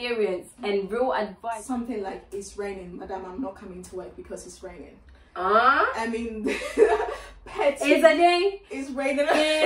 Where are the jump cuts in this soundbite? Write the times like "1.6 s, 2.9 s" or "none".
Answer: 1.4 s